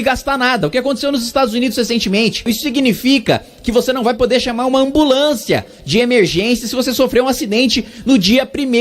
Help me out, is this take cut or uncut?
cut